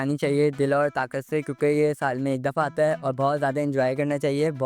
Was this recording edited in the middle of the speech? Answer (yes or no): no